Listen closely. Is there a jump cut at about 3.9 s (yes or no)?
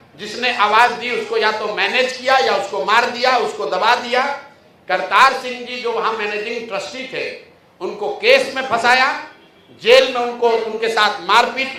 no